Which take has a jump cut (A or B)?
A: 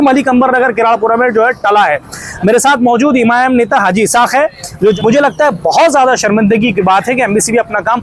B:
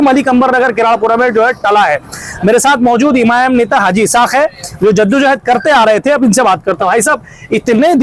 A